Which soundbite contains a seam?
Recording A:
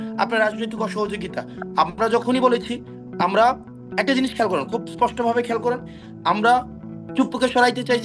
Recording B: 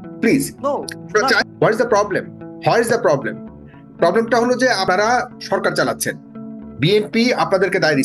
B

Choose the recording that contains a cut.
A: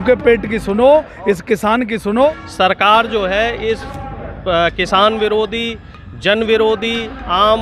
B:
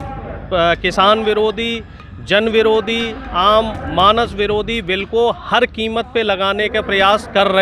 A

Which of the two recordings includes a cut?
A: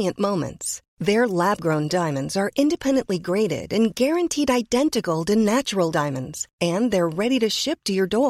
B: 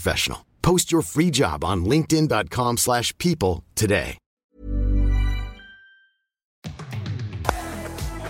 B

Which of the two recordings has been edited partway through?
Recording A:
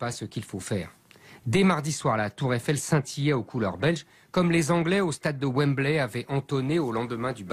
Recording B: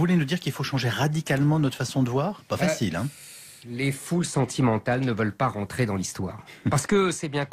A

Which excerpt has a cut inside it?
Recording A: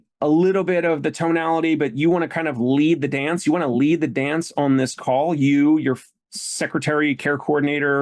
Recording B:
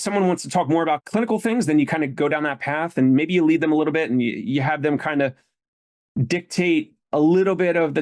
B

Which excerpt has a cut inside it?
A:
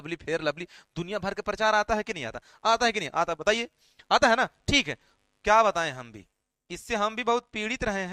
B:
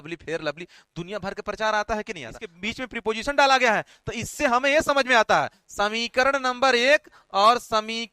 B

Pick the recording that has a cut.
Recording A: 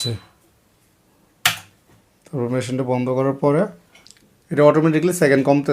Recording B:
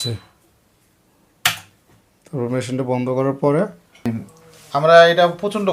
A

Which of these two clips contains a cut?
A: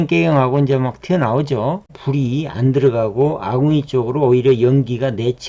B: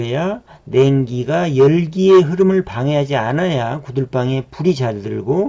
A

